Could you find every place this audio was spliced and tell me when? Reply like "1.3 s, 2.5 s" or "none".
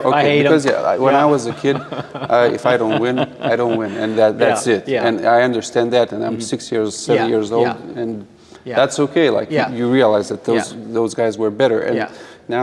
none